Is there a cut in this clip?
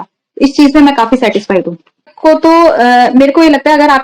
yes; 1 cut; at 2.1 s

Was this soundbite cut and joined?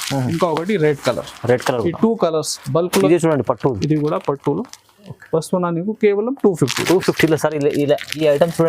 yes; 1 cut; at 2.9 s

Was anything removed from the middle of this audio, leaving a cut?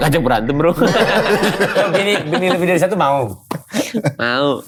no; 0 cuts

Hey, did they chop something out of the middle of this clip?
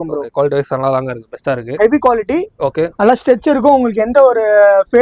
yes; 1 cut; at 1.8 s

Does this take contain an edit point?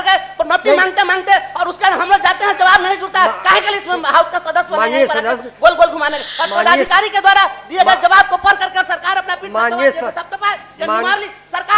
no; 0 cuts

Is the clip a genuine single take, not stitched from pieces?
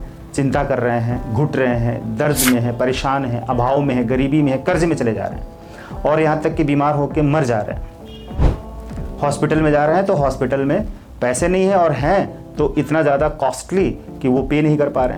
yes; 0 cuts

